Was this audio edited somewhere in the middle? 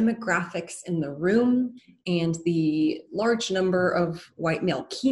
no; 0 cuts

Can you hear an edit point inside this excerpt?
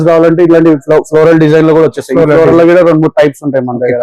no; 0 cuts

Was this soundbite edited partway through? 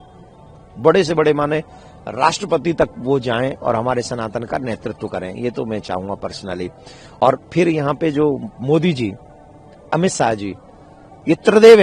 no; 0 cuts

